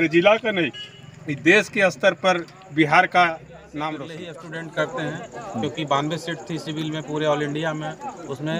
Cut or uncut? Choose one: cut